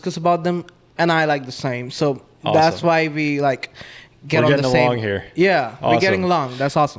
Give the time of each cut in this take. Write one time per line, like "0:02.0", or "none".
none